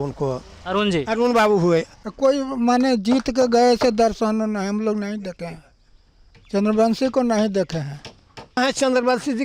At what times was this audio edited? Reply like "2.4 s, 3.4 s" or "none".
2.0 s, 8.6 s